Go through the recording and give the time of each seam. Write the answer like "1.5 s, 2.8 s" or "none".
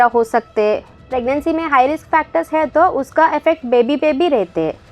1.0 s